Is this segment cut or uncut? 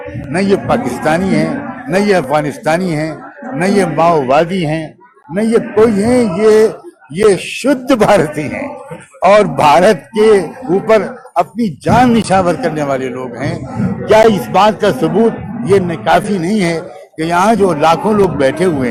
uncut